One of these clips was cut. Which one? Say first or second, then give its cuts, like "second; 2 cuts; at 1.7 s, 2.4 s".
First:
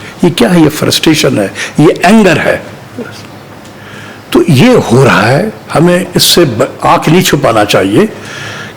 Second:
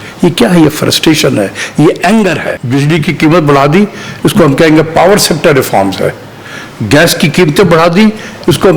second; 1 cut; at 2.5 s